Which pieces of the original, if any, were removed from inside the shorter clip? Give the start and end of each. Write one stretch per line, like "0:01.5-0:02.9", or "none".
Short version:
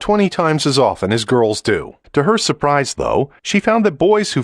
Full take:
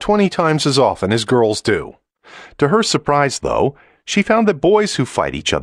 0:02.0-0:02.4
0:03.8-0:04.0